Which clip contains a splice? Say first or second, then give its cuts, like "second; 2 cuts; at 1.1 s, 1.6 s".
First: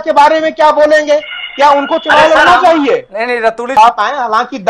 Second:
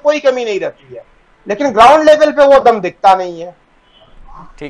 first; 1 cut; at 3.8 s